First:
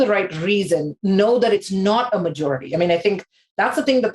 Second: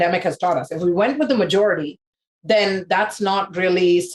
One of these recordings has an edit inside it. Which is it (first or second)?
first